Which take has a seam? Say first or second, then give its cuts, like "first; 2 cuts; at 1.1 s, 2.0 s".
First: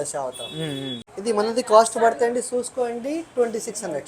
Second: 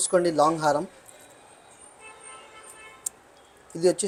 first; 1 cut; at 1.1 s